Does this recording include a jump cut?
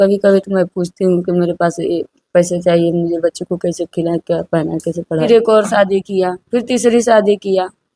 yes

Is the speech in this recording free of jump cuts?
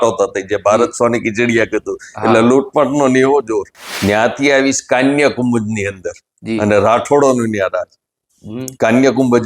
no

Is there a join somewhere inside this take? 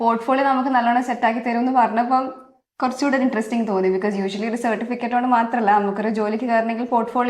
no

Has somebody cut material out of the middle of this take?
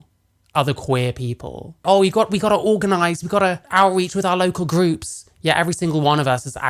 yes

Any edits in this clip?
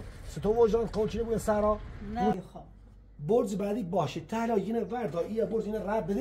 yes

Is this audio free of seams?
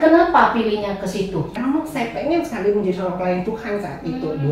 no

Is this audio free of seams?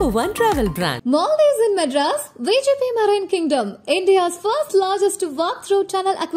yes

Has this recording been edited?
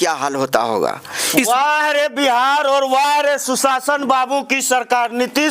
yes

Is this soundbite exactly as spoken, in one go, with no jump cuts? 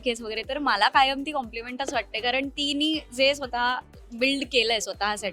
yes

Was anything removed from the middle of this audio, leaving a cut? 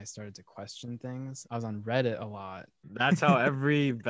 yes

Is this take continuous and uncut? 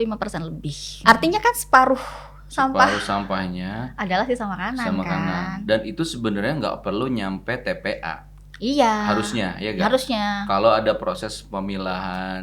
no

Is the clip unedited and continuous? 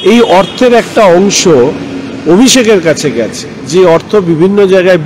yes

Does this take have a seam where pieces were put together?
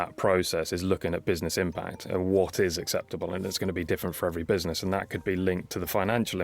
no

